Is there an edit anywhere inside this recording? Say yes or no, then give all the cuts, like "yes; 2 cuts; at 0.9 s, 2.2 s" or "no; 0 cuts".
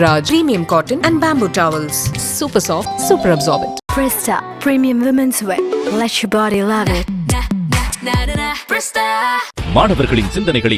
no; 0 cuts